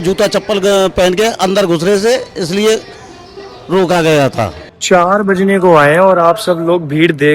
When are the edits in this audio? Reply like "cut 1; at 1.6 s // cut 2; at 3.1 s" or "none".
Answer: cut 1; at 4.7 s